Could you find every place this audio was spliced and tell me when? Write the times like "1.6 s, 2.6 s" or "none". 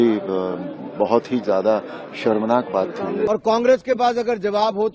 3.3 s

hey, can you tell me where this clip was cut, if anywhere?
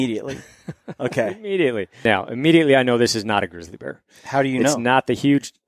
1.9 s

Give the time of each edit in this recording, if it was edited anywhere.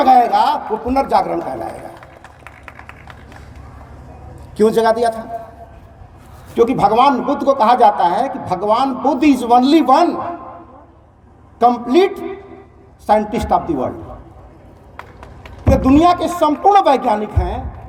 none

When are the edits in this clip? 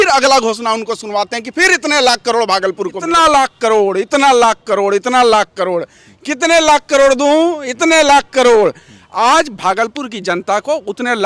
3.0 s

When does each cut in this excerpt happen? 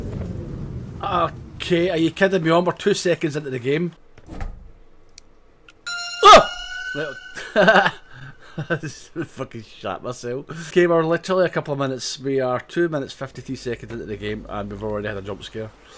4.1 s, 10.7 s

